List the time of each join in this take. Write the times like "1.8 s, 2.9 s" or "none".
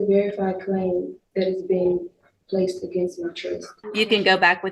3.8 s